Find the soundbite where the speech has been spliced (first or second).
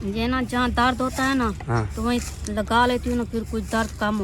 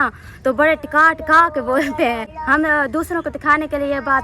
second